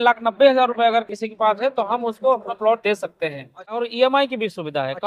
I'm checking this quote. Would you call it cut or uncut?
cut